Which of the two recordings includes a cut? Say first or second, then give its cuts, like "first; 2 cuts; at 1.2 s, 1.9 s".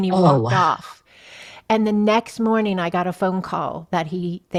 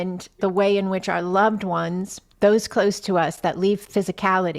second; 2 cuts; at 2.2 s, 3.8 s